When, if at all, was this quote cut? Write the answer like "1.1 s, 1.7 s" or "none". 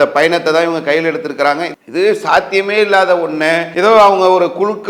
1.8 s, 3.7 s